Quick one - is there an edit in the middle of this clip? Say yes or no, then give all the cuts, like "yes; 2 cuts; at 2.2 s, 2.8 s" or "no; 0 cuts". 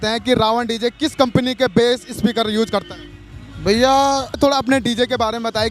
yes; 1 cut; at 4.4 s